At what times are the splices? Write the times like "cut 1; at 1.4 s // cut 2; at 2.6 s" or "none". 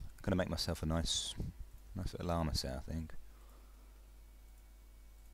cut 1; at 3.9 s